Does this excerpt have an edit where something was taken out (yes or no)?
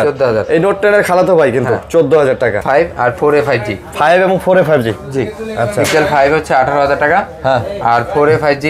yes